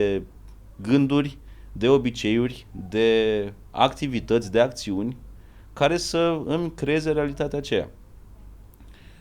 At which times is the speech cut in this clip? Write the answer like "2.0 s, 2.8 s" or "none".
none